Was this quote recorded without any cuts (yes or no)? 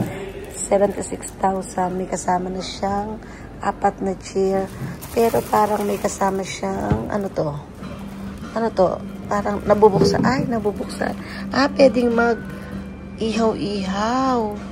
yes